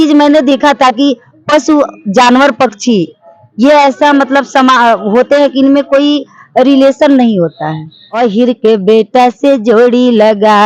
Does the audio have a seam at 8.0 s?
yes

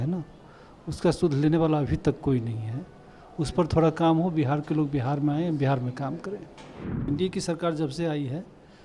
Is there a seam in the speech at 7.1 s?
yes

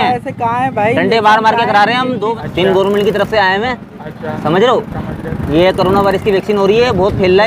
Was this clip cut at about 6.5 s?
no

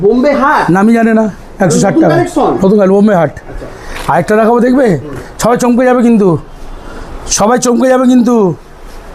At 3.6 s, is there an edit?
no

